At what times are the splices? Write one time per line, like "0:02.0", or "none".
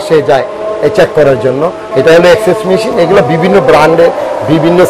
0:01.8